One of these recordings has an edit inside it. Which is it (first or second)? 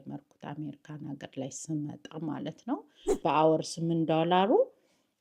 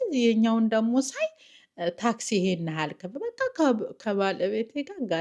first